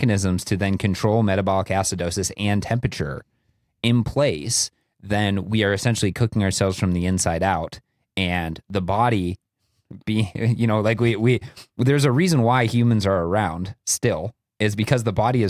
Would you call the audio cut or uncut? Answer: uncut